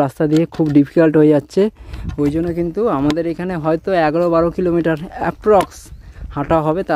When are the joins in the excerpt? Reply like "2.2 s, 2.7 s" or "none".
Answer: none

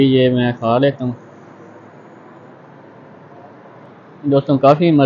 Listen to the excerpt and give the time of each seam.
3.9 s

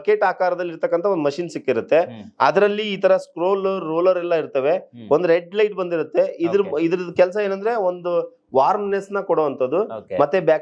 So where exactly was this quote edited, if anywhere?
none

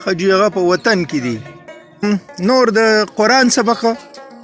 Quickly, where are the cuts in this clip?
2.0 s

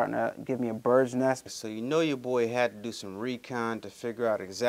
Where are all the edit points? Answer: 1.5 s

